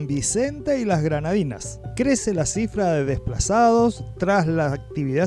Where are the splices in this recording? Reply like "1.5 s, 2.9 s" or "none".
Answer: none